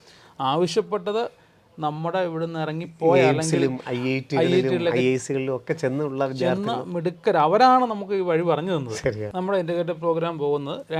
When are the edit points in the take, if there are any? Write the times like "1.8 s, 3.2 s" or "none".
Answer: 9.3 s